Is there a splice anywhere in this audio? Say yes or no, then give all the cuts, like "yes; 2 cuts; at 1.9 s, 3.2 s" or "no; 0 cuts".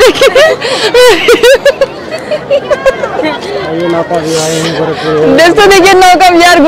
no; 0 cuts